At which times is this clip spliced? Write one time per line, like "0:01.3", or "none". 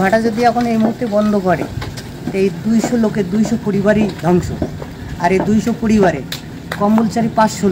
none